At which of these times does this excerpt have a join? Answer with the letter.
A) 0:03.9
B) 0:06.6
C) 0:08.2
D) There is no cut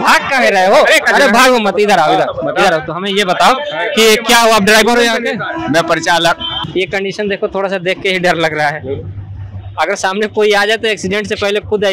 B